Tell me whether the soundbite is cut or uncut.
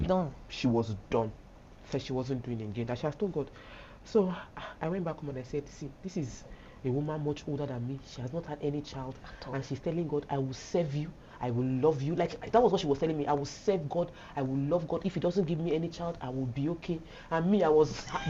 uncut